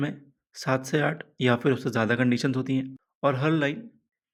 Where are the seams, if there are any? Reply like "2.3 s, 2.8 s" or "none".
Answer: none